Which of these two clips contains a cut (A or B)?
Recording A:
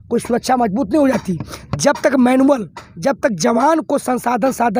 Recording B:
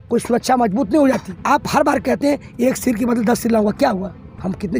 B